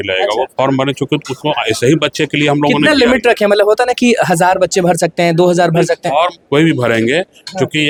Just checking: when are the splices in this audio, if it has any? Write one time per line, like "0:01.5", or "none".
none